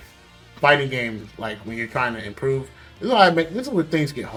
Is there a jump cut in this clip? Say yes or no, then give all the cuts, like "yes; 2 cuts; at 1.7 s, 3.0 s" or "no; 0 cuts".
no; 0 cuts